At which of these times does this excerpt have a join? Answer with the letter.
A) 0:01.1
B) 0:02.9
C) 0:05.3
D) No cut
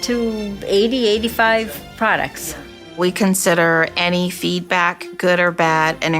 B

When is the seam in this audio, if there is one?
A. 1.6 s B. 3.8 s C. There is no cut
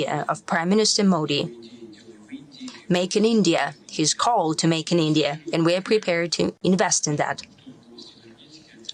C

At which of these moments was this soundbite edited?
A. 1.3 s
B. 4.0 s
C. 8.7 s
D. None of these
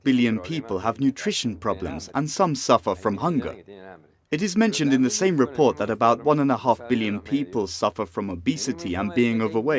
D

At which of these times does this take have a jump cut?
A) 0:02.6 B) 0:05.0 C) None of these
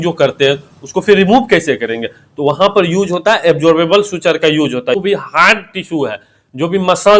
B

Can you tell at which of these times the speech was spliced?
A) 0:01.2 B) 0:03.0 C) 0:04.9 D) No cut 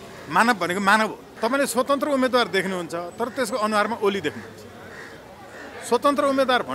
A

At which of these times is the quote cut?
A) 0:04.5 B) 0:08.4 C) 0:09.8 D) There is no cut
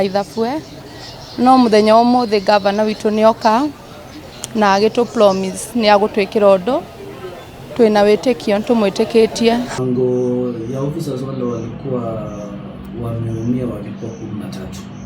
C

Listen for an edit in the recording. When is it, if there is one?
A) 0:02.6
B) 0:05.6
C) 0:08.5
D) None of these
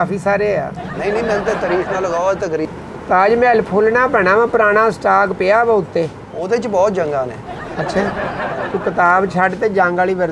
A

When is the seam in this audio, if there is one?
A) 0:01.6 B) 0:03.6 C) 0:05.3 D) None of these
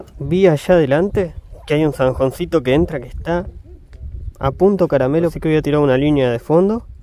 C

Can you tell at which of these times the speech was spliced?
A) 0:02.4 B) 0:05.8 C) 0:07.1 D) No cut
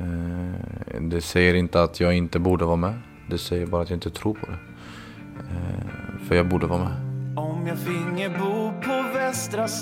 C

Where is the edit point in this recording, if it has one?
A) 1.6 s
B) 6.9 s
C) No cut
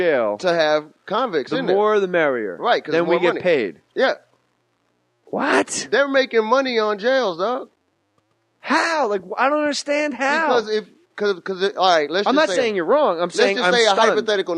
B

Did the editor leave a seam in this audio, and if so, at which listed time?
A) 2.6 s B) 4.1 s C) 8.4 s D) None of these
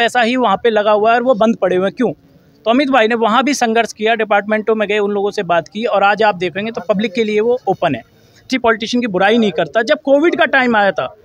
C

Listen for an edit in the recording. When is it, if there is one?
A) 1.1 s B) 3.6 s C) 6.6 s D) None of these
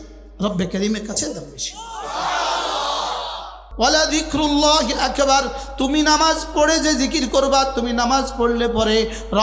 B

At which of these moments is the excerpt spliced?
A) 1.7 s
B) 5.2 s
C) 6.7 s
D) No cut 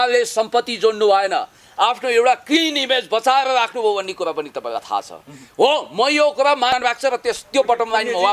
C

